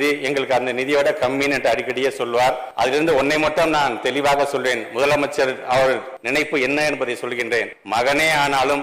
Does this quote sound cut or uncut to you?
cut